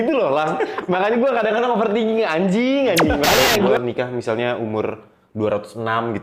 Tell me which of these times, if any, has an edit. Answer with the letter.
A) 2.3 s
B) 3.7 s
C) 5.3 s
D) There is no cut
B